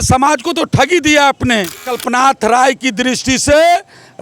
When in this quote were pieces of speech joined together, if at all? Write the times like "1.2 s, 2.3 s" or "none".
2.0 s